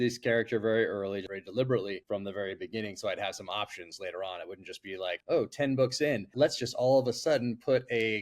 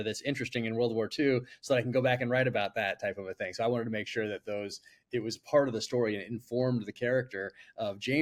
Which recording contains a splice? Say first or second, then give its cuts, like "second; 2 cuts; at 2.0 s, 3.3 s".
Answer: first; 4 cuts; at 1.3 s, 2.0 s, 5.2 s, 6.3 s